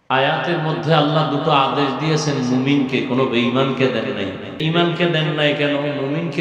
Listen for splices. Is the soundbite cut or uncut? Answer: cut